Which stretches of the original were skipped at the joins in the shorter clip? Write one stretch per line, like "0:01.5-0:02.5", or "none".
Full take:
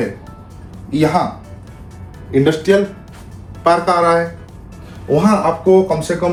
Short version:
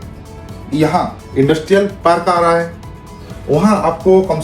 0:01.4-0:02.2
0:02.9-0:03.6